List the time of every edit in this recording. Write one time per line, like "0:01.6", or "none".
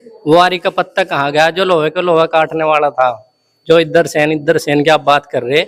none